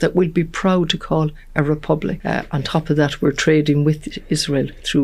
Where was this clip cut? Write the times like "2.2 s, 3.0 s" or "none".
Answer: 2.2 s